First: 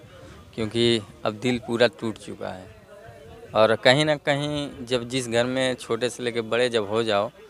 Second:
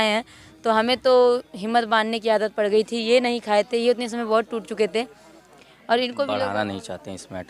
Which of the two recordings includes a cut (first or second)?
second